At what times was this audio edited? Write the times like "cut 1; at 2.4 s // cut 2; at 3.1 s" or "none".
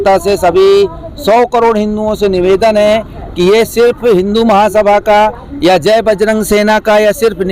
none

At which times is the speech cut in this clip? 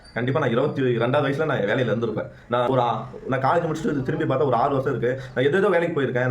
cut 1; at 2.7 s

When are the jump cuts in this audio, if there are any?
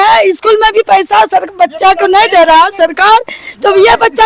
none

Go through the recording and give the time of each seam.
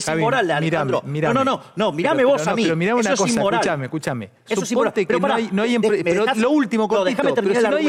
none

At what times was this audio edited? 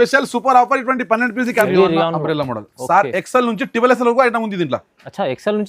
cut 1; at 1.6 s

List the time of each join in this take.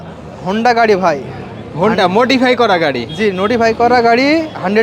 none

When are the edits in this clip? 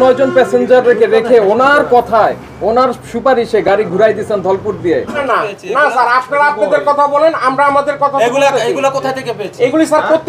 cut 1; at 5.2 s

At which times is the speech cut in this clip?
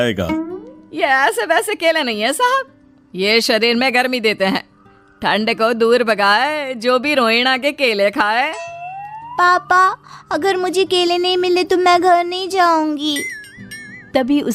none

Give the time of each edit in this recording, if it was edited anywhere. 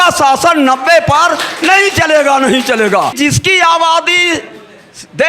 cut 1; at 3.1 s

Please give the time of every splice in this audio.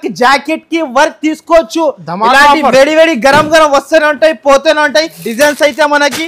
cut 1; at 5.2 s

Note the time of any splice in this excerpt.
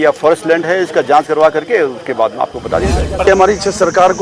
cut 1; at 3.2 s

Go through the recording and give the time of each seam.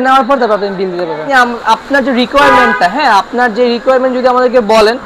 cut 1; at 1.2 s

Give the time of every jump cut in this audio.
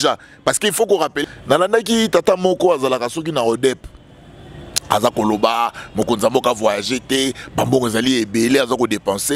cut 1; at 1.1 s

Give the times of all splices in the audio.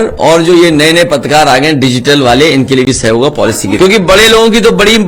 cut 1; at 3.8 s

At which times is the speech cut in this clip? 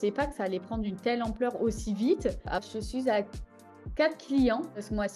cut 1; at 2.6 s

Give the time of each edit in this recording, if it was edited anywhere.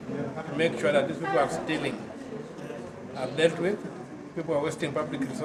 none

